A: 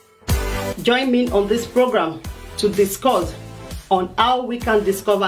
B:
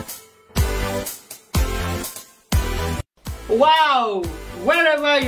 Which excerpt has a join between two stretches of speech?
B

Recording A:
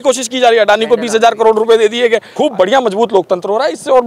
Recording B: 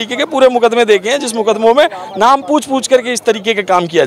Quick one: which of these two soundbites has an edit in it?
A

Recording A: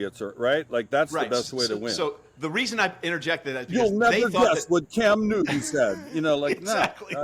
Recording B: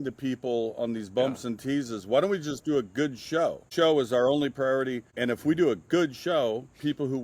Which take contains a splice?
B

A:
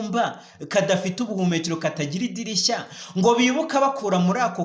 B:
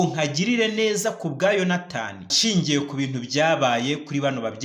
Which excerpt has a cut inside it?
B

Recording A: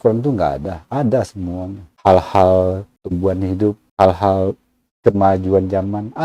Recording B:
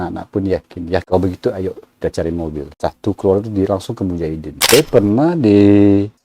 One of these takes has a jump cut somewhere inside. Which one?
B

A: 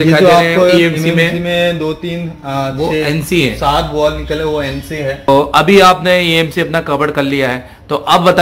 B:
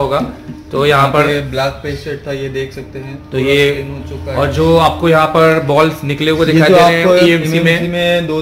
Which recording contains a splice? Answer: A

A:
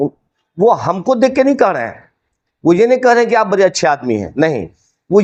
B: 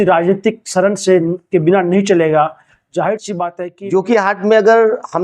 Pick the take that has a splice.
B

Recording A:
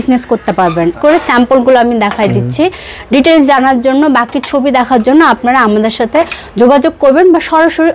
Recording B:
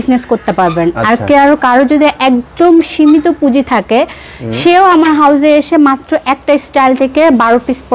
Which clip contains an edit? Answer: A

